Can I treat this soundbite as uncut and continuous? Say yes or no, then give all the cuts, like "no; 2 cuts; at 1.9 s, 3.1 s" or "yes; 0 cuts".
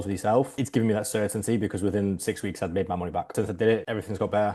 no; 1 cut; at 3.3 s